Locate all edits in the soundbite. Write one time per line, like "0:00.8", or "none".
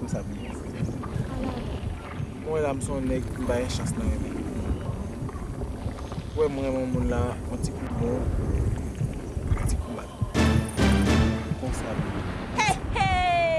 0:05.2